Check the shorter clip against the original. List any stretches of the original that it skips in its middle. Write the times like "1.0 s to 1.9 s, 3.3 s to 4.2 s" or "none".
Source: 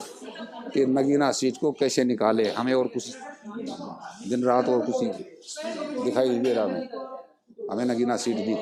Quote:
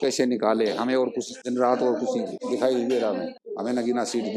3.1 s to 4.2 s, 5.2 s to 5.9 s, 6.9 s to 7.5 s